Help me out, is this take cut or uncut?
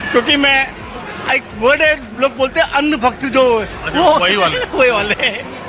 uncut